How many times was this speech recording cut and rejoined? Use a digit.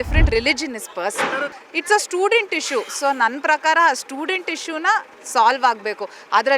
1